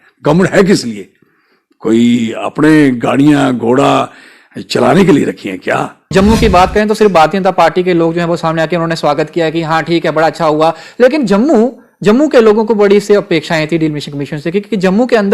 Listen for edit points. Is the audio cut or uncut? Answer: cut